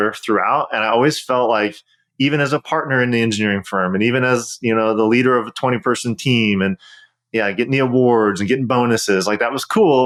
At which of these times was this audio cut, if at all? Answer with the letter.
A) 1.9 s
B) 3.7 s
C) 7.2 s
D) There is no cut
D